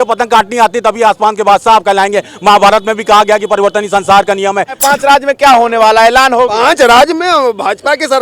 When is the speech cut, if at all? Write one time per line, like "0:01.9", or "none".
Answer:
0:04.8